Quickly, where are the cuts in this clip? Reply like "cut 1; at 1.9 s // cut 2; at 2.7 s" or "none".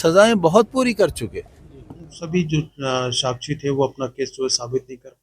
cut 1; at 2.2 s